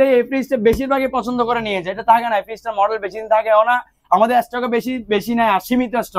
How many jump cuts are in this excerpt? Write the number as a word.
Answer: zero